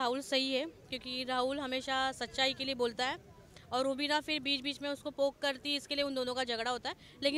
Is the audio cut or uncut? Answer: uncut